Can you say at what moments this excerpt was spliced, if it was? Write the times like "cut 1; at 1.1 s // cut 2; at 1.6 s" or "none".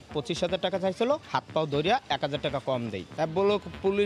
cut 1; at 3.0 s